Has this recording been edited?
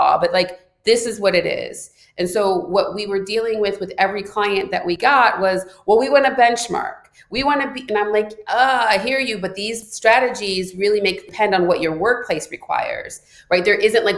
yes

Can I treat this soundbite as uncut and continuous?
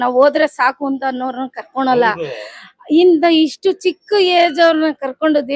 yes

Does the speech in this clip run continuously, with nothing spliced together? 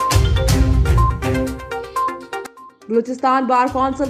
no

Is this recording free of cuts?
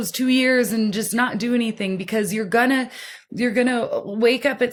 yes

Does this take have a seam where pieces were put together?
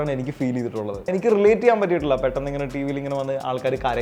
yes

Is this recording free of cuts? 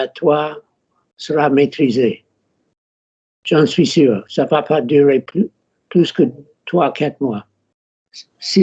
no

